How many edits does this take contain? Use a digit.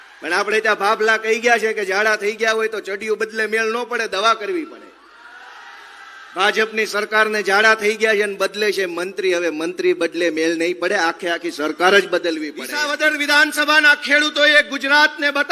1